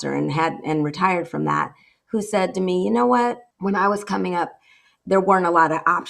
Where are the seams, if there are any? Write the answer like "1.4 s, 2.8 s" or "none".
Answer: 3.5 s